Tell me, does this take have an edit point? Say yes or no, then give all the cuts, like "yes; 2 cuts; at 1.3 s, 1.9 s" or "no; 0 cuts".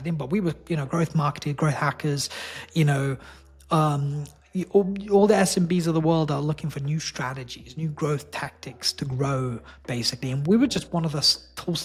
no; 0 cuts